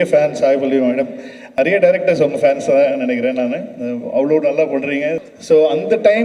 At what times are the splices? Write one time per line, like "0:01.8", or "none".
0:01.5
0:05.2